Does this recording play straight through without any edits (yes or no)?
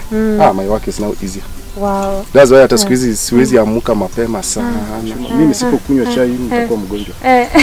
no